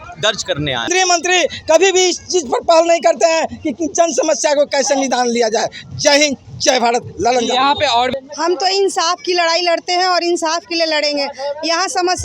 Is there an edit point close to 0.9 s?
yes; 2 cuts; at 0.9 s, 8.1 s

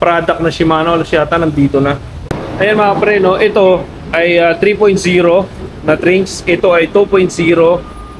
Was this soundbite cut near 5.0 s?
no; 1 cut; at 2.2 s

